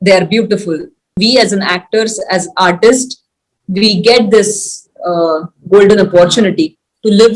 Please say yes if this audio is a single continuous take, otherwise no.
no